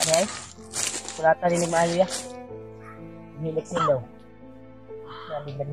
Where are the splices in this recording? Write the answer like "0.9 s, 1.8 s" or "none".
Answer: 2.1 s, 3.4 s